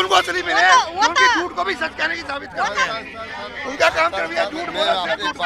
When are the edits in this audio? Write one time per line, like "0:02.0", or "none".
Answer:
none